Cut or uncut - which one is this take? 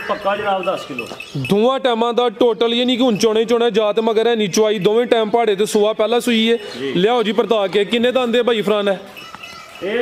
uncut